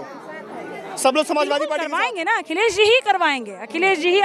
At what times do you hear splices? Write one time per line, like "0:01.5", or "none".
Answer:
0:01.9